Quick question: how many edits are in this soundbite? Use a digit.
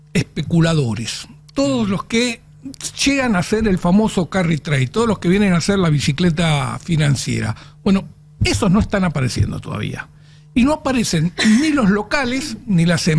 1